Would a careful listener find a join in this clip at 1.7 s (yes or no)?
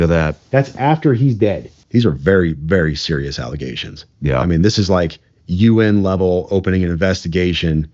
yes